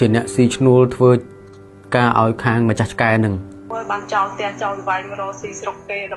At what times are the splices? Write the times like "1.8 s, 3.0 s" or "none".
3.7 s